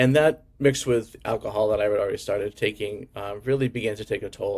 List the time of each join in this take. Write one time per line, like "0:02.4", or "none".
none